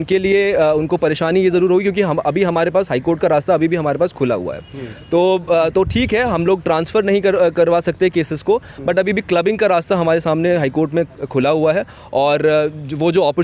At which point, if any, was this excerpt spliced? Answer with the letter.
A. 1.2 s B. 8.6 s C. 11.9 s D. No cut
D